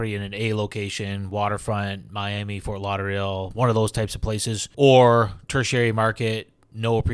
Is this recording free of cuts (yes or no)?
no